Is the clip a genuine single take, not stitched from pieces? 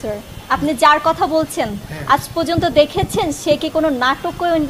yes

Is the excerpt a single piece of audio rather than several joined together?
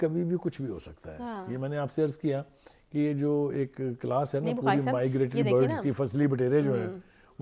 yes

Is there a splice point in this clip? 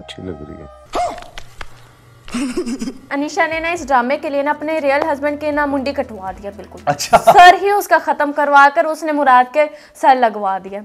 yes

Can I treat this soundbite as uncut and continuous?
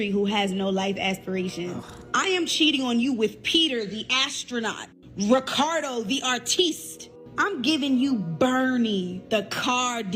yes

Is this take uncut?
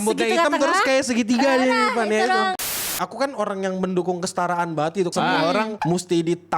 no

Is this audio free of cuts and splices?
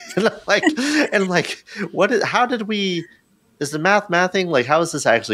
yes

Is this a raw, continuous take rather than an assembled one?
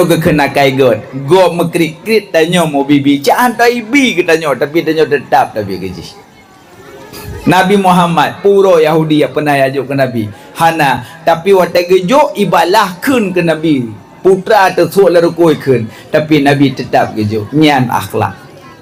yes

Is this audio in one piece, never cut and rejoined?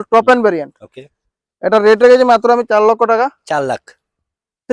yes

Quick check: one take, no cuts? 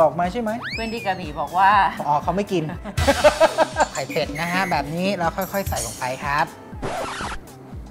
no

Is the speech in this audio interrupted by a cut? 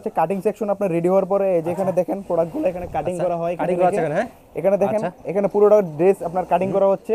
no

